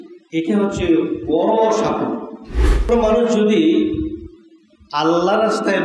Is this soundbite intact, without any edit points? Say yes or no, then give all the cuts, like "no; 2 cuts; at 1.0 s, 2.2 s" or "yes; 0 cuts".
no; 1 cut; at 2.9 s